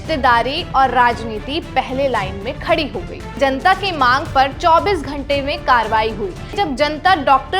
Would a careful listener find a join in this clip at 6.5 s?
yes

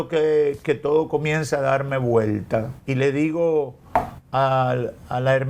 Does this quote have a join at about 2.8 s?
yes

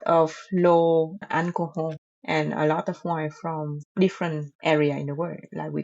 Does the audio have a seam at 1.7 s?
no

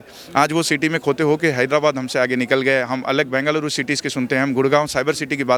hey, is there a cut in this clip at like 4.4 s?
no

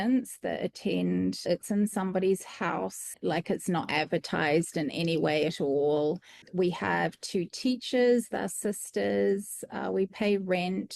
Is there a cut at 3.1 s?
yes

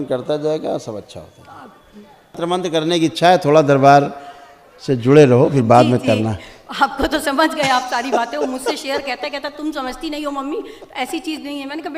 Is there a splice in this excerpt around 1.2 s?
no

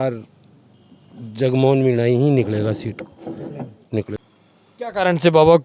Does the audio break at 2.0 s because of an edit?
no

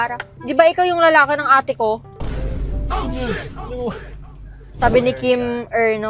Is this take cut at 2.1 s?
no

